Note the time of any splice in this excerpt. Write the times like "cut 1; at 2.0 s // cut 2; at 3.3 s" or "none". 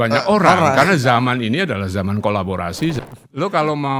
cut 1; at 3.0 s